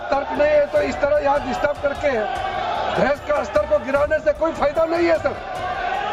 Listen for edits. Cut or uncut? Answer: uncut